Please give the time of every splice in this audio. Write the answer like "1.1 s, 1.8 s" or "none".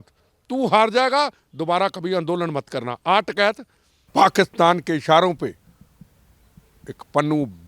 3.9 s

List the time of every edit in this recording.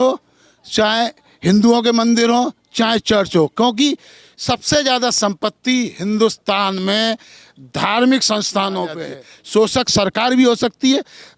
9.0 s

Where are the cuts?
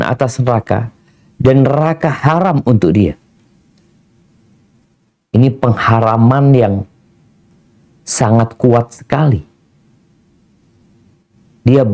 none

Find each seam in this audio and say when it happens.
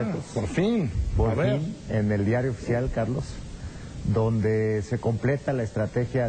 4.5 s

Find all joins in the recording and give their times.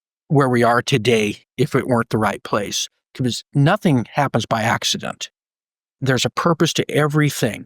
3.5 s, 6.0 s

